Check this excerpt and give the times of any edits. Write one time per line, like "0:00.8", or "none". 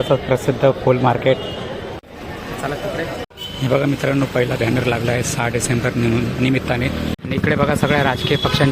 0:02.0
0:03.2
0:07.1